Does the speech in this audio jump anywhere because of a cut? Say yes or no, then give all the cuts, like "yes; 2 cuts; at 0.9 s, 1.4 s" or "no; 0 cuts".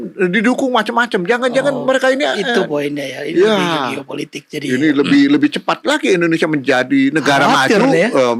no; 0 cuts